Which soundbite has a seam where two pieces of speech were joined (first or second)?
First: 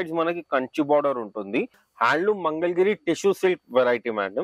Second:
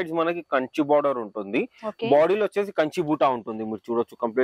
first